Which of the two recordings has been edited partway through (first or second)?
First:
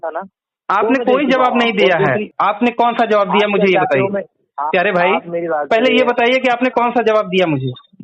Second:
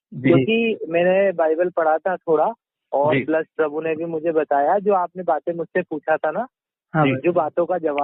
first